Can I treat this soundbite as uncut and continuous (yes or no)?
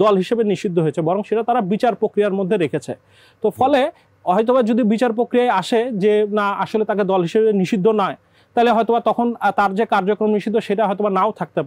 yes